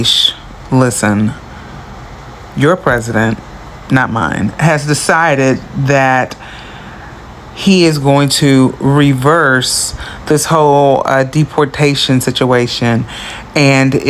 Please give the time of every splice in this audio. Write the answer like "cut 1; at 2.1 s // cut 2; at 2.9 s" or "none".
none